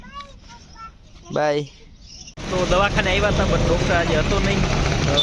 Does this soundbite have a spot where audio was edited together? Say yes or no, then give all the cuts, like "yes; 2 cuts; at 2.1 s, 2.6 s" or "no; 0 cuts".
yes; 1 cut; at 2.4 s